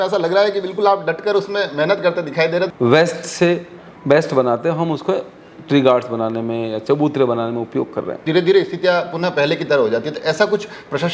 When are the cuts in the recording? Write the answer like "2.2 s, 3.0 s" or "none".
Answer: 2.7 s, 8.2 s